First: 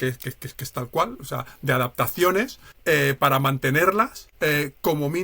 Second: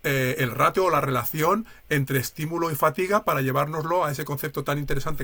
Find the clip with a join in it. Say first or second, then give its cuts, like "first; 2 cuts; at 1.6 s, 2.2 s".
first; 2 cuts; at 2.7 s, 4.2 s